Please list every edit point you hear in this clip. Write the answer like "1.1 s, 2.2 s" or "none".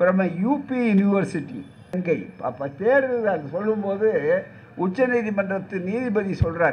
2.0 s